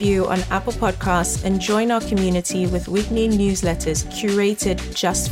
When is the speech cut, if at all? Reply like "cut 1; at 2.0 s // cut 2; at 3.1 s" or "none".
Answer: none